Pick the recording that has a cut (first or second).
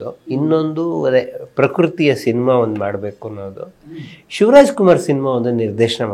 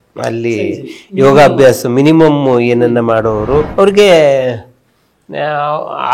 second